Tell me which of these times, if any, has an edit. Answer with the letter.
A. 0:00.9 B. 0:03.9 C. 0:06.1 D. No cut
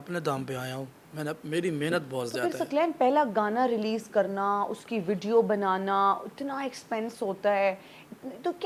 D